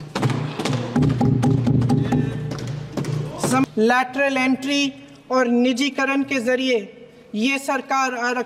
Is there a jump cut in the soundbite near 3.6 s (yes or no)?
yes